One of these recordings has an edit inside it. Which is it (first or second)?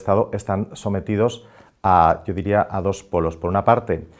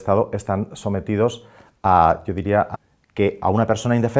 first